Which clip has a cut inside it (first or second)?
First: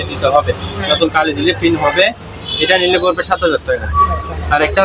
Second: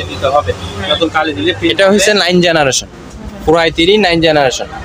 second